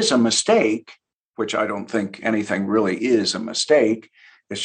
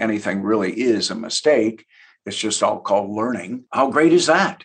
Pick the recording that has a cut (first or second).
second